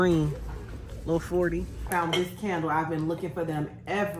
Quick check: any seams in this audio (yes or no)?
yes